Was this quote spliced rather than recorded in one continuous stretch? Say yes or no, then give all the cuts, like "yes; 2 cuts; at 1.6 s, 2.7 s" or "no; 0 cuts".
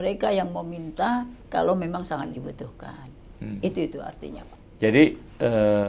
no; 0 cuts